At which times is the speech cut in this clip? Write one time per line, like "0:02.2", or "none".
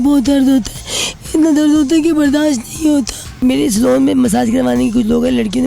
0:03.4